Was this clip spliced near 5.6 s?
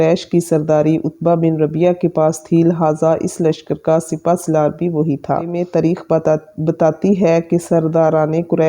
yes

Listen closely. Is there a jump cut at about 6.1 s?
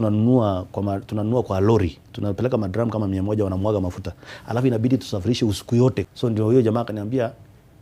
yes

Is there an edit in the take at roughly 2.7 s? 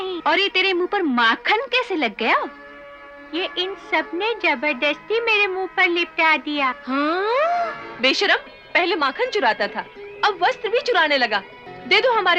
no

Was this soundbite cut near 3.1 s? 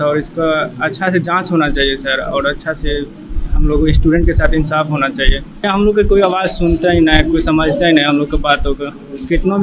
no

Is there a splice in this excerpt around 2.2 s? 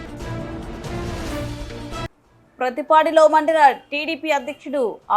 yes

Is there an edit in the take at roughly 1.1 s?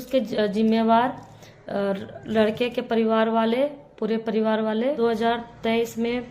no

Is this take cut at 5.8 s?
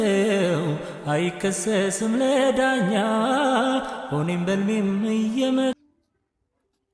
yes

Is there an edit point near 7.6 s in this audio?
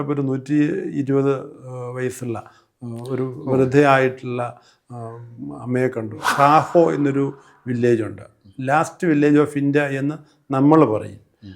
no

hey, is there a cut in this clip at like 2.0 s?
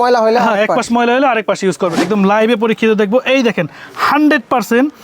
yes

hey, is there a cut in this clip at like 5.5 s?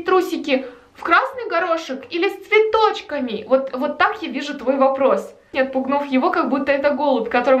yes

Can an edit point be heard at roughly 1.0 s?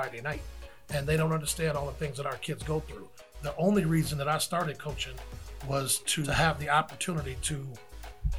no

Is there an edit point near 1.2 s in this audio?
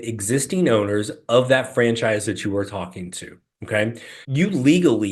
no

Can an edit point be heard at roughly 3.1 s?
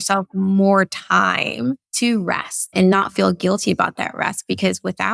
no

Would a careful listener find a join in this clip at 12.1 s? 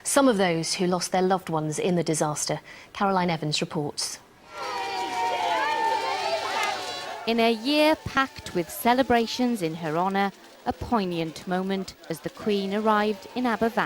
yes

